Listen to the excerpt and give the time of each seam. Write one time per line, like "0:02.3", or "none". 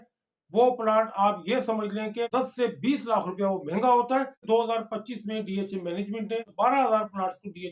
0:02.3
0:04.4
0:06.5